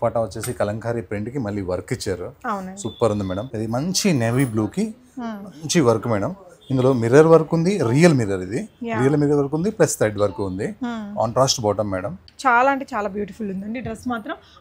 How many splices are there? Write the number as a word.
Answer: two